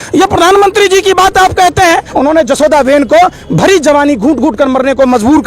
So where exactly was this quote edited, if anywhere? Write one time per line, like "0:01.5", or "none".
0:02.1